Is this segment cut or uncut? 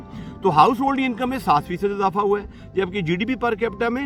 uncut